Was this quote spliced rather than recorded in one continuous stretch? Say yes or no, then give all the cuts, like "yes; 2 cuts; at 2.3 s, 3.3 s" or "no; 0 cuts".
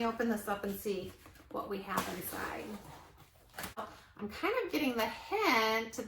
yes; 1 cut; at 4.0 s